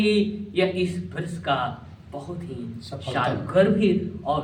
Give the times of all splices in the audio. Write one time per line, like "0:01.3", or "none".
none